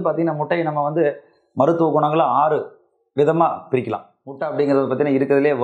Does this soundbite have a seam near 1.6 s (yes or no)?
no